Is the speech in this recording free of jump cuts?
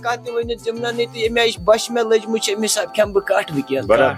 yes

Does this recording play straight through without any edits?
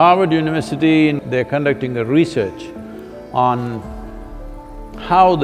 no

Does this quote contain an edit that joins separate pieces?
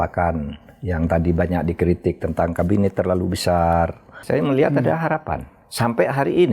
yes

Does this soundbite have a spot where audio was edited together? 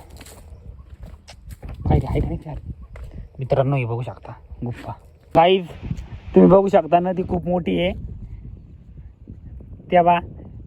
yes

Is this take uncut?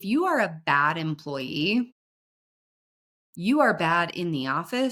yes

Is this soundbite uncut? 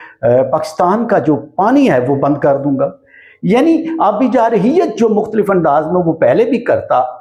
yes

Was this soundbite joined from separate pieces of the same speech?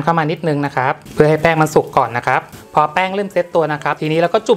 yes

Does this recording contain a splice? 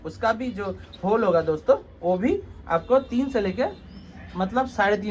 no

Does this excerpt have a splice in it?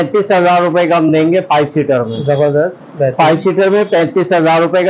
no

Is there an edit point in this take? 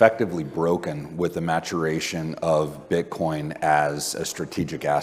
no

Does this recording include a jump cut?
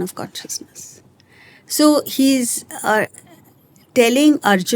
no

